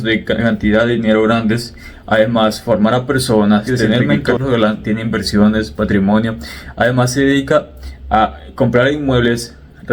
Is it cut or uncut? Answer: cut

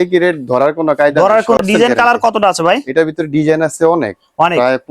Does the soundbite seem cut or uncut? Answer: cut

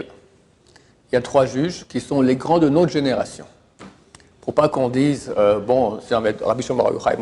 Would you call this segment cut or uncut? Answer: uncut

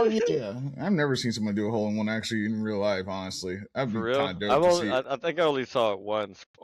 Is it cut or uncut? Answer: uncut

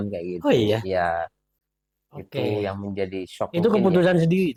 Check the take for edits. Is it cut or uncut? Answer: uncut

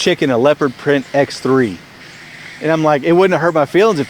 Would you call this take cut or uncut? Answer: uncut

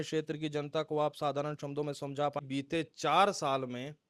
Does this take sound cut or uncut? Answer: cut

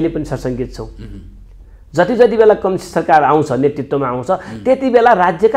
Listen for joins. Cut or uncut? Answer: uncut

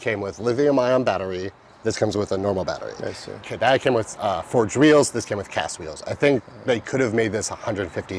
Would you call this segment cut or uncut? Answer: uncut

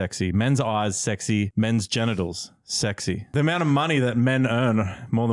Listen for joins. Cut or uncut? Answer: cut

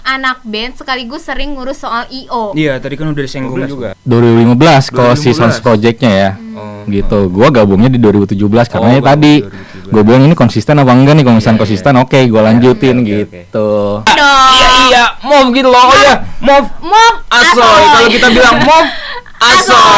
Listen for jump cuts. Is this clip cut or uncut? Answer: cut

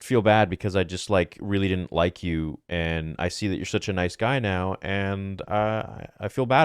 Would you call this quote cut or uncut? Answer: uncut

